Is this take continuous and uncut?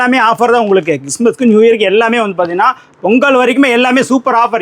yes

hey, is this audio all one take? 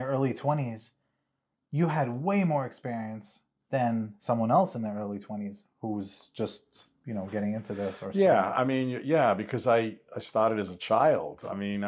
yes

